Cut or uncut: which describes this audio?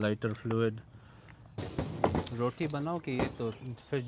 cut